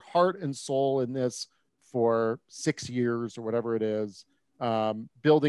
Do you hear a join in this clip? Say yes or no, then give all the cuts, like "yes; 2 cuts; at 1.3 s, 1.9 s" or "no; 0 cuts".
no; 0 cuts